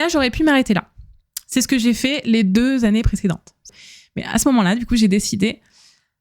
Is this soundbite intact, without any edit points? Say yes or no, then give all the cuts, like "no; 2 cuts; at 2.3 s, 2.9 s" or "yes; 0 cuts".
no; 1 cut; at 3.6 s